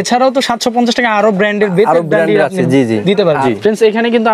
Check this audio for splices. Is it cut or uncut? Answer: cut